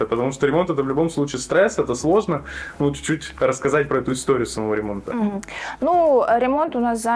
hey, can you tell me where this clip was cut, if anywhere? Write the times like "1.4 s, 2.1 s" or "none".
none